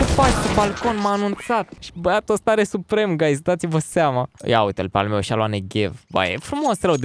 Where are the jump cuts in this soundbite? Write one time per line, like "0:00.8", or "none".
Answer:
0:01.8
0:04.3